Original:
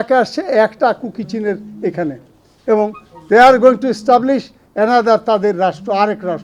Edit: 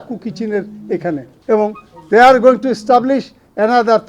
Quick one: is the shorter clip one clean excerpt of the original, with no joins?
no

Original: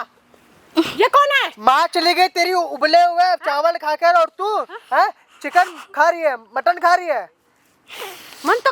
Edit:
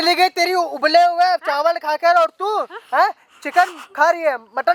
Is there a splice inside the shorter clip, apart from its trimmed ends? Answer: no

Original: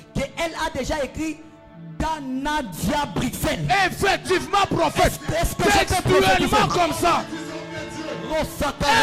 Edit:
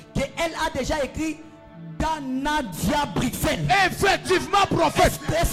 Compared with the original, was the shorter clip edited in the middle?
no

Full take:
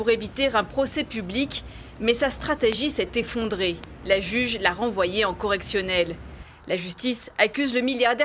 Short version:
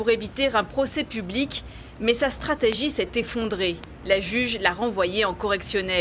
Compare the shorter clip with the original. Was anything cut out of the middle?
no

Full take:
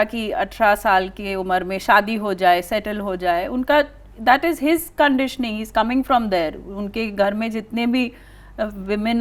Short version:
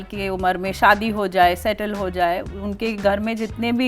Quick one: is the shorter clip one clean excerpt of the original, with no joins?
no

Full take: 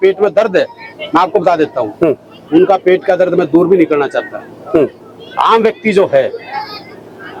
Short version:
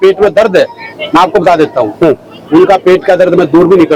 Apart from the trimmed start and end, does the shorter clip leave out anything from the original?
no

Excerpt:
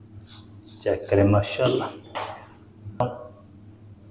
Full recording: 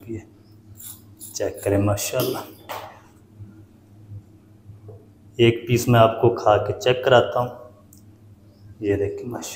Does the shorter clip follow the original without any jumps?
no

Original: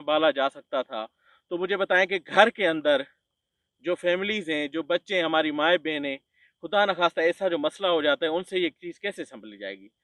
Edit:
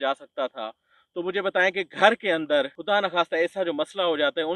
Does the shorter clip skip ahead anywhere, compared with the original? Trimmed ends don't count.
yes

